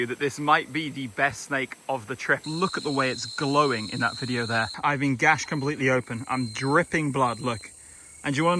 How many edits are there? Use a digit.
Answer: 2